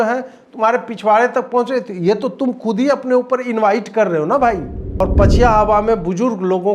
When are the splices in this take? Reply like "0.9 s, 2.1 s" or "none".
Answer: 5.0 s